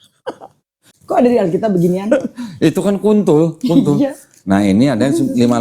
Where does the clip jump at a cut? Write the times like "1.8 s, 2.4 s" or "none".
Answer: 0.9 s